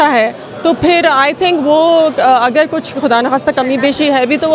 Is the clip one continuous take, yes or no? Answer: yes